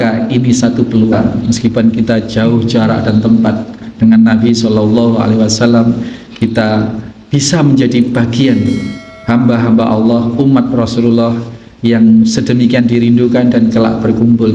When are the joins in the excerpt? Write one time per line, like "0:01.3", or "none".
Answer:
0:01.2